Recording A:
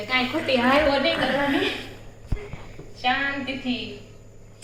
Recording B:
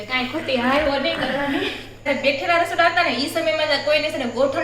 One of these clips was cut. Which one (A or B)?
B